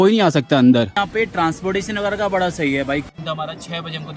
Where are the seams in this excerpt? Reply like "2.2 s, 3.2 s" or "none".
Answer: 0.9 s, 3.1 s